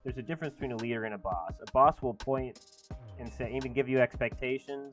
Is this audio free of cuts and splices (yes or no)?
yes